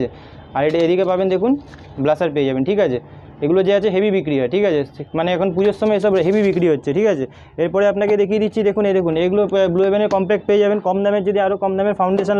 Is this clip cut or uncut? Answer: uncut